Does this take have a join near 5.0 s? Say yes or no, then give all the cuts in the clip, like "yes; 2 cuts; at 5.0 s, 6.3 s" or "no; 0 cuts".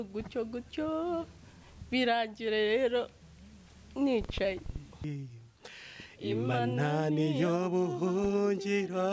yes; 1 cut; at 5.0 s